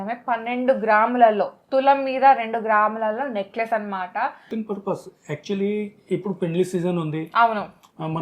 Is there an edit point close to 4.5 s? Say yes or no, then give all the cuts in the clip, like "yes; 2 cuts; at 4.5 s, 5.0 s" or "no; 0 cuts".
yes; 1 cut; at 4.5 s